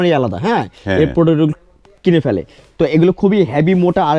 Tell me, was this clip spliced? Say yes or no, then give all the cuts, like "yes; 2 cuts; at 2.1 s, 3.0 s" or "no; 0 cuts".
no; 0 cuts